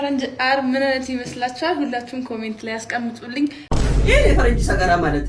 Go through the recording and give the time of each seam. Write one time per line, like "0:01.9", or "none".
0:03.6